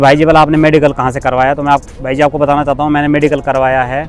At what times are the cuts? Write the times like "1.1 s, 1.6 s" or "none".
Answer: none